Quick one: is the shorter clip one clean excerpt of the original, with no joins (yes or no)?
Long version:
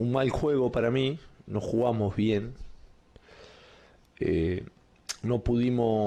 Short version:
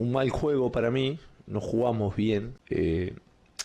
no